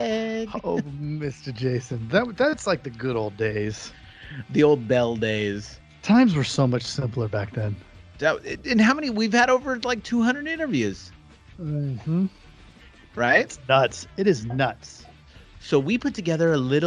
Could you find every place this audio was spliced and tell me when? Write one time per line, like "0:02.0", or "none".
none